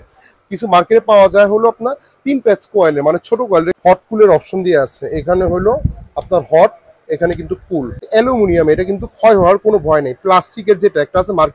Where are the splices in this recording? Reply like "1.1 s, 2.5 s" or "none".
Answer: 3.7 s, 8.0 s